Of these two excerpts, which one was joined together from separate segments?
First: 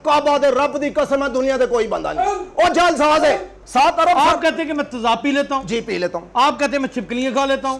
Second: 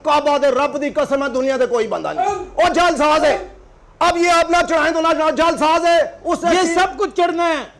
first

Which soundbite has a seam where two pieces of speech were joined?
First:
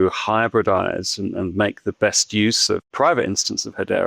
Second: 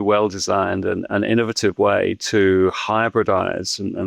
first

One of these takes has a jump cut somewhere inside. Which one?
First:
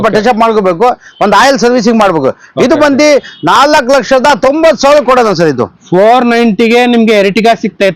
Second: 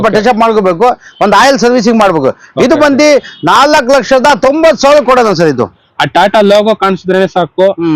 second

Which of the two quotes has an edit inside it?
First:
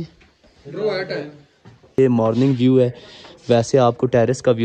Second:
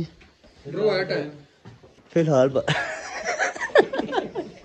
first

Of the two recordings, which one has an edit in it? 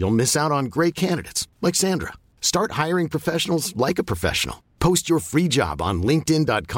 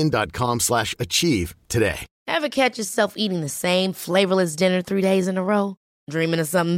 second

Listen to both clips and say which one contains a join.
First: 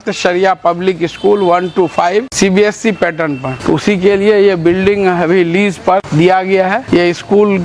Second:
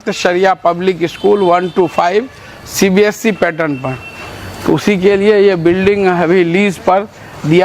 first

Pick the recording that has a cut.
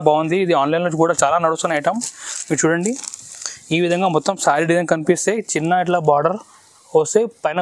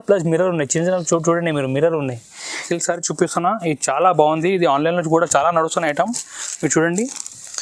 second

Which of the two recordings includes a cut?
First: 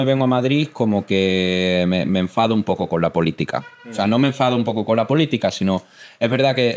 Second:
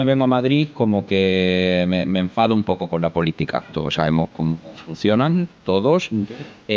second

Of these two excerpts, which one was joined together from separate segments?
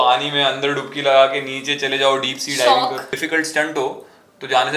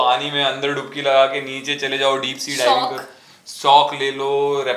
first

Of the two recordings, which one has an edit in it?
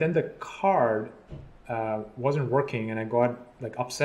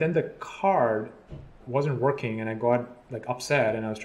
second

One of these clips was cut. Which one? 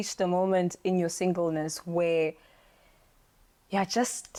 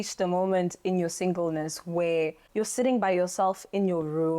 second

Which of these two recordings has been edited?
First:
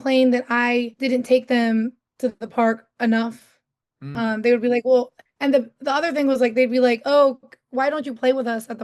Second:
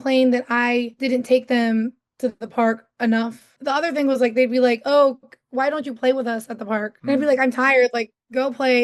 second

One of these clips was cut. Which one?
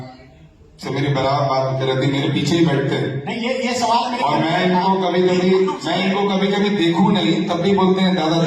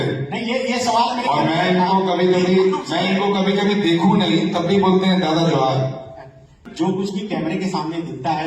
second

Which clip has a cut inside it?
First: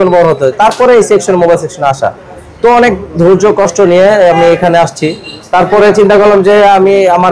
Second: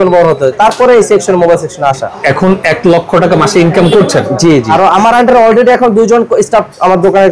second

